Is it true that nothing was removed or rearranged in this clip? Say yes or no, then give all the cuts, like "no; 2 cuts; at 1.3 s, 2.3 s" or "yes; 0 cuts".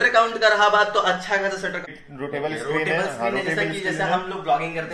no; 1 cut; at 1.8 s